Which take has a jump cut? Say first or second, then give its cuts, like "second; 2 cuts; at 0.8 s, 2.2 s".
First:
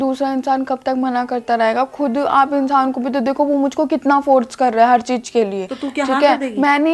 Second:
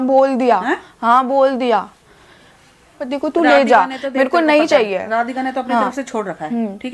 second; 1 cut; at 3.1 s